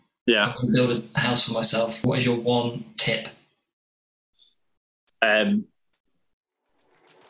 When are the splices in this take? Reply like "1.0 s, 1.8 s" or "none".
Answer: 2.0 s